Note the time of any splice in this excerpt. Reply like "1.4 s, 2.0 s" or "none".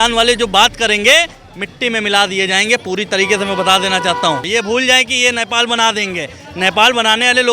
4.5 s